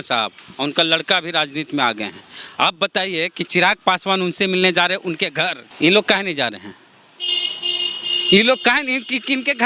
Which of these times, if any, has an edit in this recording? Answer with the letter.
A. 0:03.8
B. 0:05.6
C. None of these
B